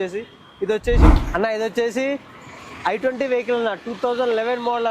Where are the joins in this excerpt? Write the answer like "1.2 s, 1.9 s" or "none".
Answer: 1.1 s